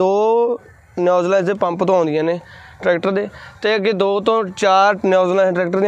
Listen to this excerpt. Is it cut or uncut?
uncut